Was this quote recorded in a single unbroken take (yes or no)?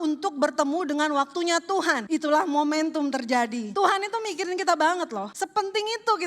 no